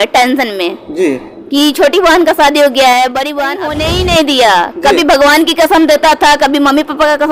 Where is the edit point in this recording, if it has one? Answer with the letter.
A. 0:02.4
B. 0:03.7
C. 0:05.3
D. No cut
B